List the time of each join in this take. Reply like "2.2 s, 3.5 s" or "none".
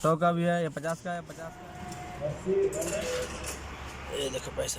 1.1 s